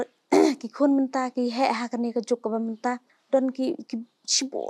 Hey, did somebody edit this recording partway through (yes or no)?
yes